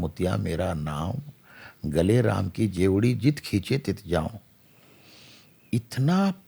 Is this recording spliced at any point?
no; 0 cuts

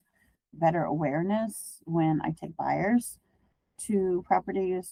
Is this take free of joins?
yes; 0 cuts

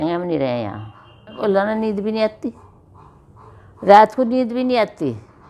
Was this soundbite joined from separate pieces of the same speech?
yes; 1 cut; at 1.4 s

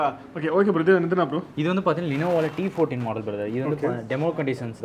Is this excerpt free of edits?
yes; 0 cuts

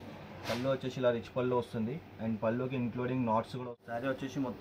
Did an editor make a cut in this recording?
yes; 1 cut; at 3.6 s

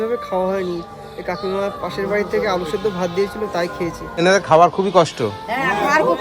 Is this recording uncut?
no; 1 cut; at 4.2 s

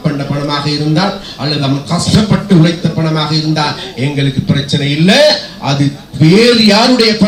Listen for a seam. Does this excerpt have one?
no; 0 cuts

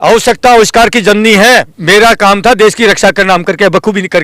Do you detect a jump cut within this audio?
yes; 1 cut; at 1.7 s

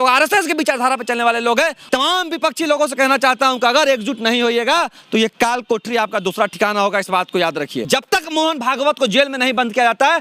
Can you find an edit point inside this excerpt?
yes; 2 cuts; at 1.8 s, 7.8 s

